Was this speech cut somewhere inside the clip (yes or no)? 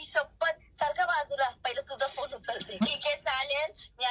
yes